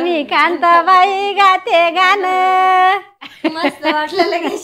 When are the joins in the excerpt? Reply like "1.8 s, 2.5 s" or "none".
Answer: 3.3 s